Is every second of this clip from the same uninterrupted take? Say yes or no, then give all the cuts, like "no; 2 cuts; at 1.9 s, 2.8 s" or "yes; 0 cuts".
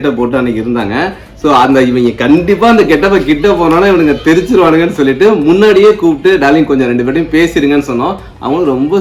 yes; 0 cuts